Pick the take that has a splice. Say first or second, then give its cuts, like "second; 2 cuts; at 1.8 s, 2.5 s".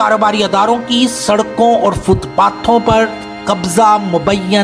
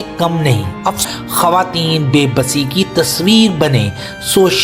second; 1 cut; at 1.0 s